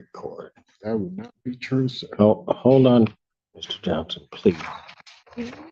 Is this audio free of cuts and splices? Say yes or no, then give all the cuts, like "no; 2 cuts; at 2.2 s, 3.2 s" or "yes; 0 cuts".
yes; 0 cuts